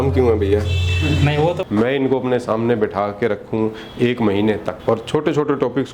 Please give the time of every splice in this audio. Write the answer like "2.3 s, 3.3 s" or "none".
1.6 s, 4.7 s